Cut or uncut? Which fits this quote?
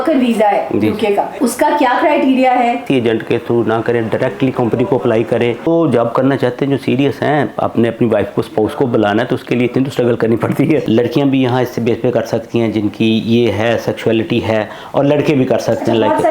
cut